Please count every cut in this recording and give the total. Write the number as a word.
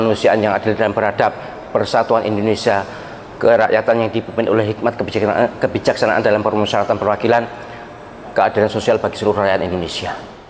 zero